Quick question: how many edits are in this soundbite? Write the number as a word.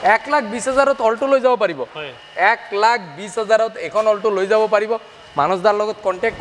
zero